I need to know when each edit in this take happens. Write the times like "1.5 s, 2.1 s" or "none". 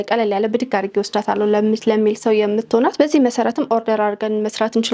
none